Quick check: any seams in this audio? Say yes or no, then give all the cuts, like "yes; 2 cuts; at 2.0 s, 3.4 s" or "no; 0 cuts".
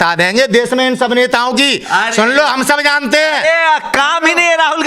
no; 0 cuts